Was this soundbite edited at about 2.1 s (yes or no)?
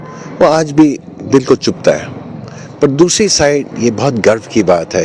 no